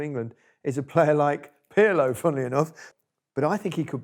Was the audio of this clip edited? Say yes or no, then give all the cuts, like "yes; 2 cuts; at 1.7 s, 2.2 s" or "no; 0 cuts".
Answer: yes; 1 cut; at 2.8 s